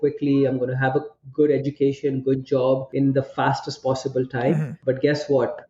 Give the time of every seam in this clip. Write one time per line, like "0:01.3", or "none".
0:02.9
0:04.7